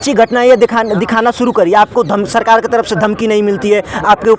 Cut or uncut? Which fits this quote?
uncut